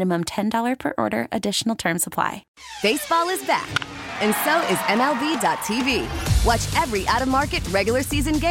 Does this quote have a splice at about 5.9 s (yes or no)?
no